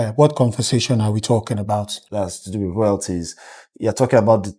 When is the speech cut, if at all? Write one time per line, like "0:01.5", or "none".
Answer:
0:02.0